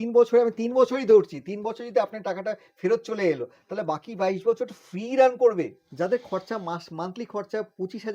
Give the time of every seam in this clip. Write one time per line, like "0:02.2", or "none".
0:05.8

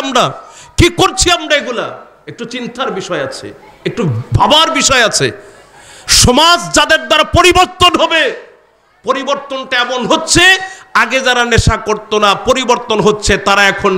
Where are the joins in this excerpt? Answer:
none

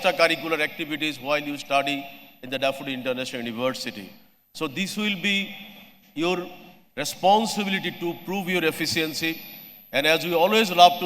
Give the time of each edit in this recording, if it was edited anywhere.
none

